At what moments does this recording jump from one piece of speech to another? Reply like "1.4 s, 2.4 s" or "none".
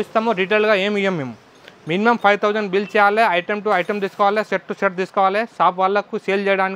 none